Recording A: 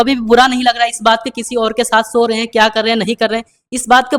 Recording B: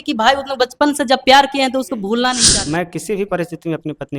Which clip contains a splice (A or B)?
B